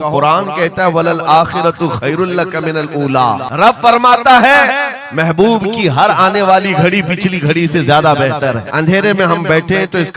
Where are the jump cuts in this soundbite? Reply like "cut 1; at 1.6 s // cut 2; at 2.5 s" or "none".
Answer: cut 1; at 3.5 s // cut 2; at 8.6 s